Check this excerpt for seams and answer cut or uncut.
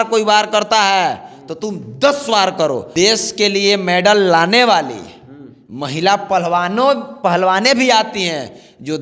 cut